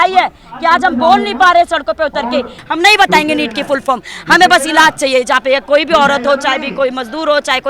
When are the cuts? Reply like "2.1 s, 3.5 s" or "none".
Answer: 2.6 s

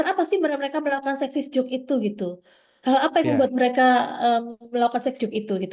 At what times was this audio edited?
none

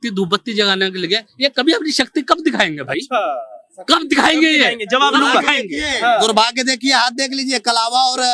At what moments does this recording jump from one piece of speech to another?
none

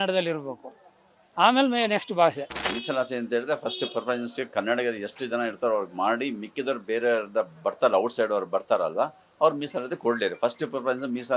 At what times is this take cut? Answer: 2.6 s

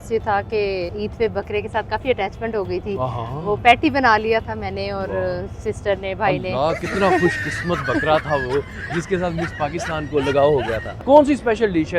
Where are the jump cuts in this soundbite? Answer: 0.9 s, 10.9 s

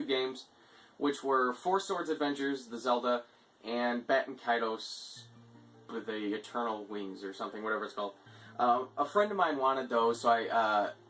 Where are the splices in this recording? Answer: 7.2 s

